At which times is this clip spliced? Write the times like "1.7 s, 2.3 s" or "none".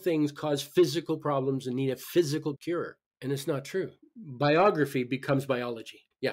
4.0 s